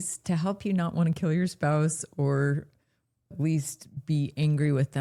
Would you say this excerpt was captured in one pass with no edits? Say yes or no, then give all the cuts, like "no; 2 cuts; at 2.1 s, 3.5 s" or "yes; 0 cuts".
yes; 0 cuts